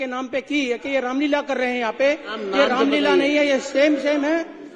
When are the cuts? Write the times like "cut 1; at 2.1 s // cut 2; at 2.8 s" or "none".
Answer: none